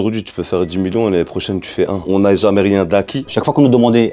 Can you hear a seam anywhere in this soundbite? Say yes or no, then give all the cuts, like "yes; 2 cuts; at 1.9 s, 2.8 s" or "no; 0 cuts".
yes; 2 cuts; at 2.1 s, 3.4 s